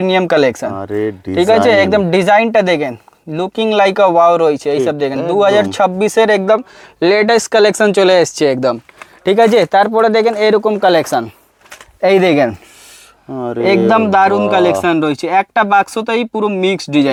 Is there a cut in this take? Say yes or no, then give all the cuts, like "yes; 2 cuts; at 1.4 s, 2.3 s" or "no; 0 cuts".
no; 0 cuts